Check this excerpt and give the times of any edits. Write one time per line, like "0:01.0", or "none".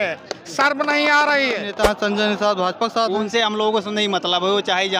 0:01.7